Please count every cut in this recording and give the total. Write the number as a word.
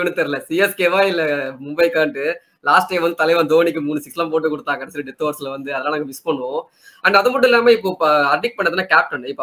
zero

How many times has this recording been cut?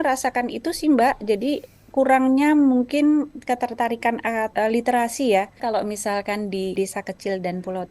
three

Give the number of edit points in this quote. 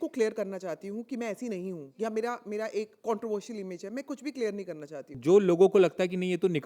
three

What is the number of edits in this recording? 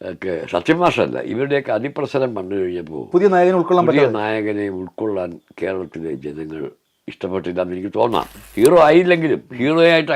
one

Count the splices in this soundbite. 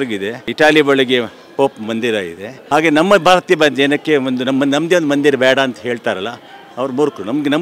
zero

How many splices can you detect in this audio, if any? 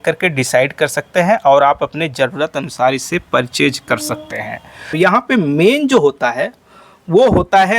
one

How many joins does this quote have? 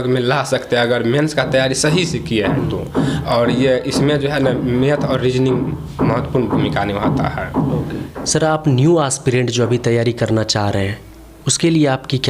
zero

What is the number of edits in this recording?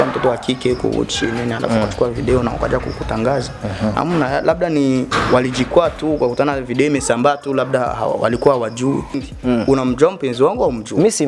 one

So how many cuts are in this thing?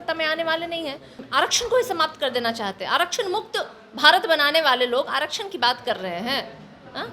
one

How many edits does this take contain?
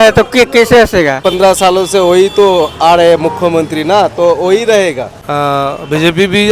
two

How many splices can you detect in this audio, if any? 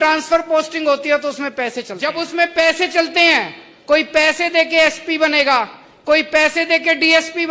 one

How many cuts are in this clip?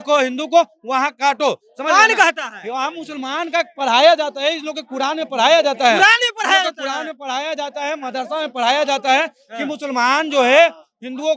zero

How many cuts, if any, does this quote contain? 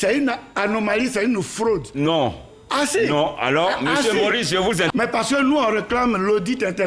one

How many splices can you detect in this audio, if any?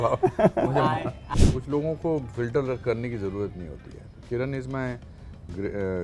one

